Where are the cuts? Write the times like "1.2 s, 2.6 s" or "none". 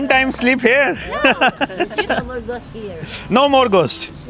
2.1 s